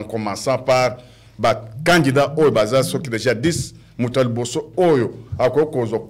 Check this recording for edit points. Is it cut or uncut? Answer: uncut